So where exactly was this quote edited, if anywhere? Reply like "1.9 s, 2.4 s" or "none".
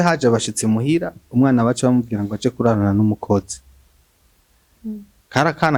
none